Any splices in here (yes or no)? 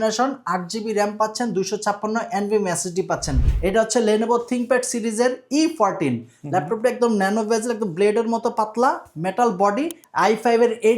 yes